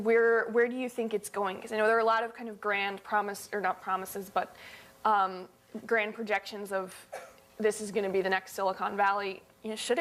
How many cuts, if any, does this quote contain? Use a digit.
1